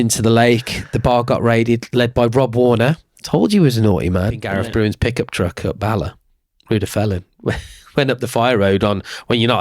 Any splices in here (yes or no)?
yes